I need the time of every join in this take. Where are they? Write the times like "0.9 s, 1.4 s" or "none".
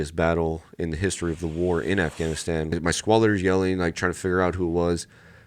2.7 s